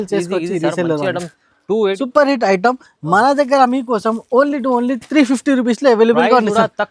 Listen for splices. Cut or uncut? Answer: cut